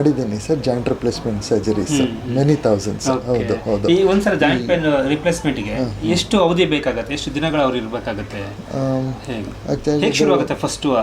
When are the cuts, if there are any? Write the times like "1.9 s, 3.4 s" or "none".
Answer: none